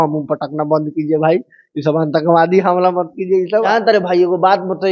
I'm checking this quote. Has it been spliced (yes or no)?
yes